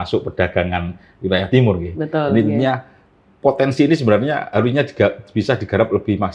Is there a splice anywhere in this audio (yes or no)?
no